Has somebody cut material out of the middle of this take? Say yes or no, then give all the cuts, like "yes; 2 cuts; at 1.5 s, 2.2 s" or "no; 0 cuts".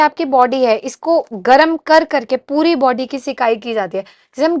no; 0 cuts